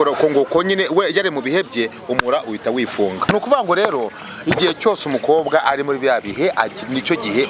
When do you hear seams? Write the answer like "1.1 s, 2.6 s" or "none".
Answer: 3.3 s